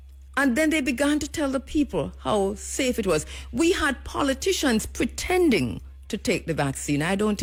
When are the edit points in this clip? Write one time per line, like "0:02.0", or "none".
none